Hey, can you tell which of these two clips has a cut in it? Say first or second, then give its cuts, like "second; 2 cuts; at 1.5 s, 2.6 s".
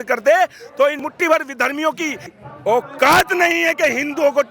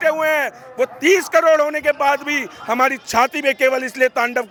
first; 1 cut; at 1.0 s